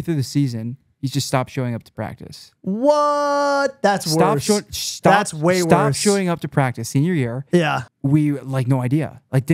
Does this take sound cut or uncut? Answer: cut